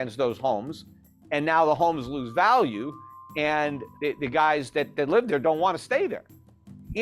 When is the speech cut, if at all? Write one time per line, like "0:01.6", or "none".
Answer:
0:03.8